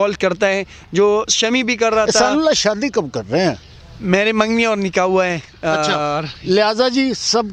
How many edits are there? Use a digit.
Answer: 1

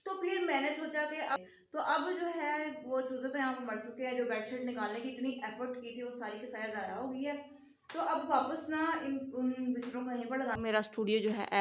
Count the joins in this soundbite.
2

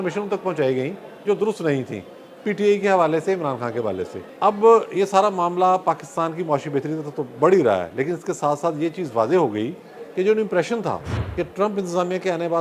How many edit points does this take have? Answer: 2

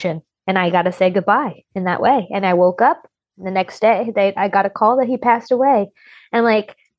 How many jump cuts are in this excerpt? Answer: 0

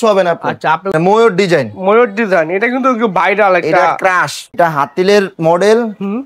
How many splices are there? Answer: 2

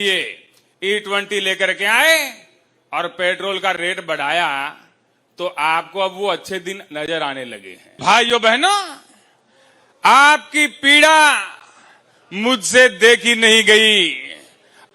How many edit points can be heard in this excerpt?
1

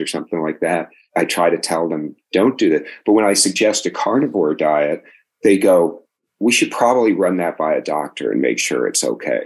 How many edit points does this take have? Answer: 2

